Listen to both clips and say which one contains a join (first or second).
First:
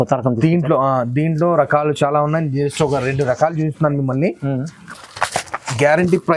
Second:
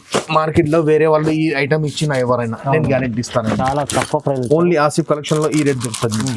first